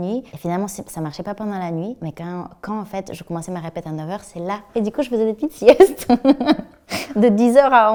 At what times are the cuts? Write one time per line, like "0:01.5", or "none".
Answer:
none